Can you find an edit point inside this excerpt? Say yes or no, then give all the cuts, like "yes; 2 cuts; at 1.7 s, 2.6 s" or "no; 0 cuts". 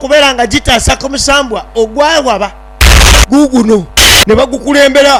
no; 0 cuts